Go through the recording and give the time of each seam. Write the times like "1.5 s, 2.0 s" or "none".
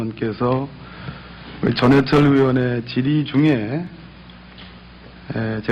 none